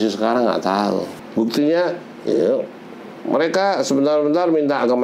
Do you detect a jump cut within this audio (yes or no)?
yes